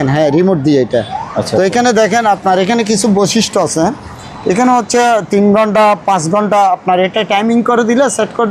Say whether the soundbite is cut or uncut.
uncut